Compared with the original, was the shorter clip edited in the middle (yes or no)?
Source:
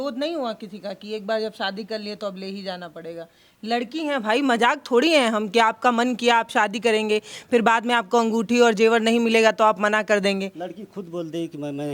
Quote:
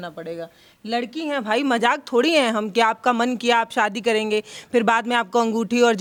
no